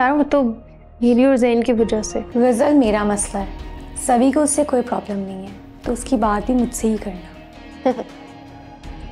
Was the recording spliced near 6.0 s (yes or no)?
no